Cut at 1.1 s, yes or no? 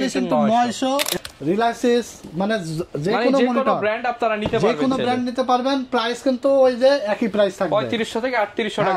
yes